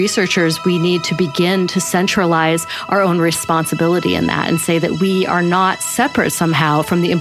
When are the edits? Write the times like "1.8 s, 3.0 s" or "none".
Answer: none